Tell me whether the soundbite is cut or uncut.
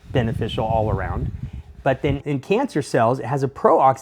cut